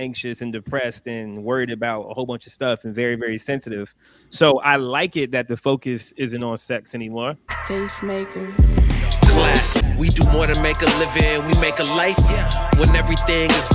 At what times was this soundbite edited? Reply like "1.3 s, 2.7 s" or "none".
7.6 s